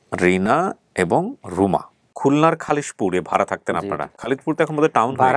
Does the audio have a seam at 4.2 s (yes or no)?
yes